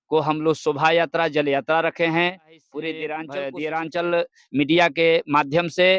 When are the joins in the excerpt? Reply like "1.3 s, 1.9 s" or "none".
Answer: 3.2 s